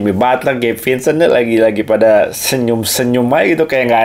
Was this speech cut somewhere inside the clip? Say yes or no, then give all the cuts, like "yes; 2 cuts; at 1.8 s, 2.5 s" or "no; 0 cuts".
no; 0 cuts